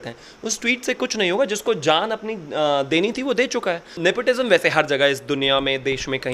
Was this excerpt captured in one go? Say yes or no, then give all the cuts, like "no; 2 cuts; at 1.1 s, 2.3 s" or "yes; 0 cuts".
no; 1 cut; at 3.9 s